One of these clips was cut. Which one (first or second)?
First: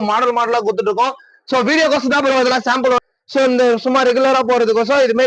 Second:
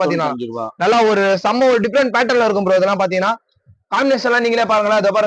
first